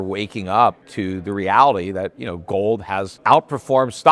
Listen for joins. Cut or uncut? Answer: cut